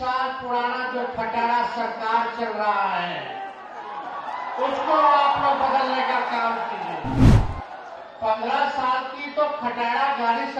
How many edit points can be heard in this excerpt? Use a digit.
0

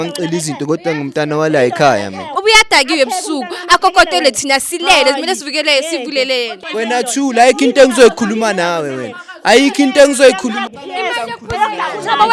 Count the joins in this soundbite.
3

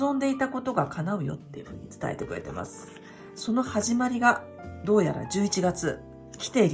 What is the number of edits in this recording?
0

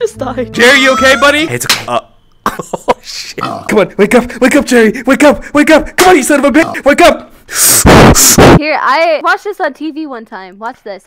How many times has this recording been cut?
1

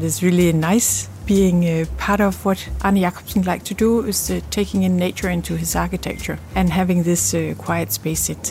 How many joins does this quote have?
2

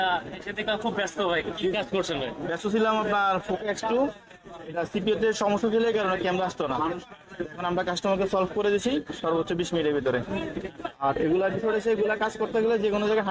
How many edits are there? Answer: 0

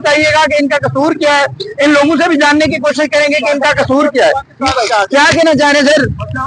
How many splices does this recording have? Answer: 0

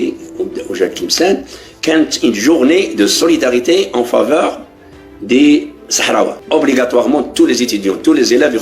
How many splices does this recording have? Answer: 1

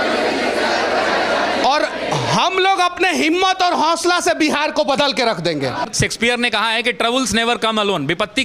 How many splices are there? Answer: 1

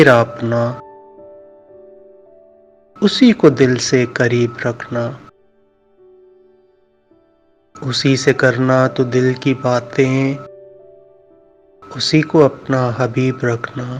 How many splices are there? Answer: 2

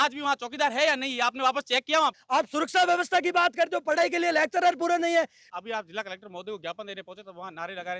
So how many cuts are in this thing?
2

